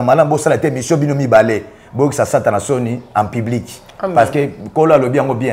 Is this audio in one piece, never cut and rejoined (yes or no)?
yes